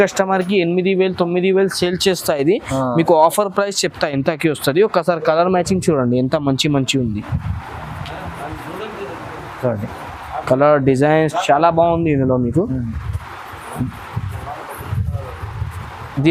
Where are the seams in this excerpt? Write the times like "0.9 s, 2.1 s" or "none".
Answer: none